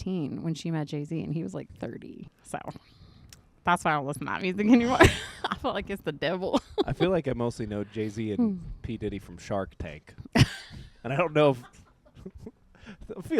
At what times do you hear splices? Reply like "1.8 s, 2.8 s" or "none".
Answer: 2.4 s